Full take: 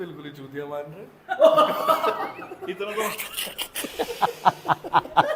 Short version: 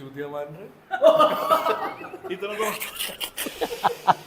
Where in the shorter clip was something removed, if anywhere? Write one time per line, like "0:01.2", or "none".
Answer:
none